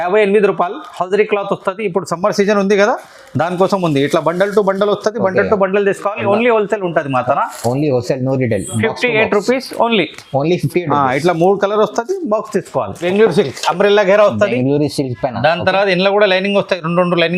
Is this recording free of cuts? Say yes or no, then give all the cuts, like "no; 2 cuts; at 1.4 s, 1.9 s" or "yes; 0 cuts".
no; 1 cut; at 13.0 s